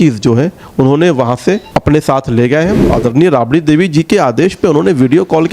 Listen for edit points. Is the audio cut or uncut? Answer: cut